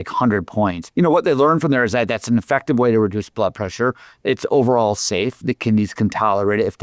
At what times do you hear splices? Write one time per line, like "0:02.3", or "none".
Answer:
0:00.8
0:05.4